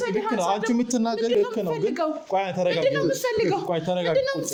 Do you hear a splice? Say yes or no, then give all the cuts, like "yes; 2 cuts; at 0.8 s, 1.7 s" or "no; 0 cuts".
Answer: no; 0 cuts